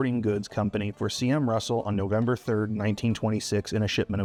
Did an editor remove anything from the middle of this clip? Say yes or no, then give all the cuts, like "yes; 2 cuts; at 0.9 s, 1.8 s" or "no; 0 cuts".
no; 0 cuts